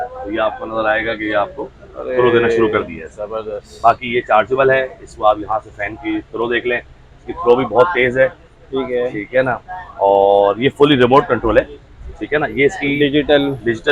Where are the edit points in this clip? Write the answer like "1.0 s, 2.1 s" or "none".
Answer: none